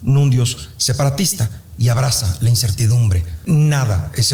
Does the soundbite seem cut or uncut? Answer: uncut